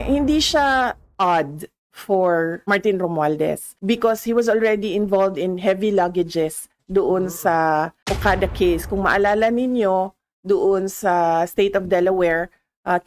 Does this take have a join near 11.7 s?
no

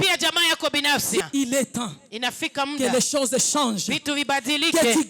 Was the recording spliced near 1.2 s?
yes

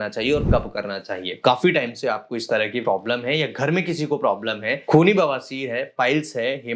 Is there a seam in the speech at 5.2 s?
no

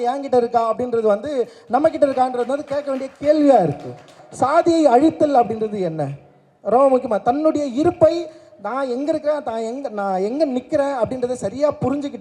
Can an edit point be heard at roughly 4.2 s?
yes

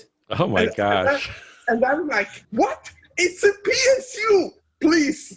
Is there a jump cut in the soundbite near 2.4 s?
yes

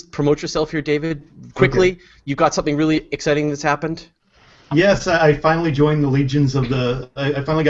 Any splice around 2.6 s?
yes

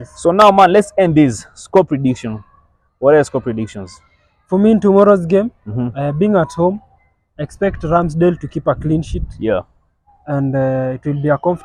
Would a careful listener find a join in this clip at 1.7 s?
no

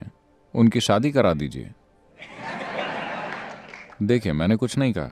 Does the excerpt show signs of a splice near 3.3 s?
no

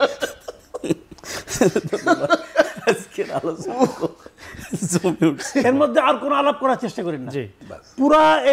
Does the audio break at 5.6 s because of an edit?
yes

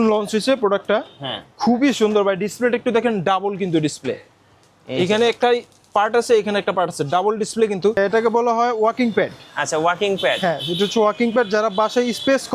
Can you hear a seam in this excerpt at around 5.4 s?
no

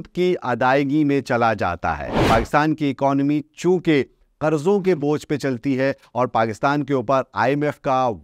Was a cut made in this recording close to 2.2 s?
yes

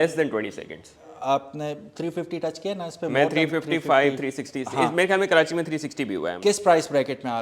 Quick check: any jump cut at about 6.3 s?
yes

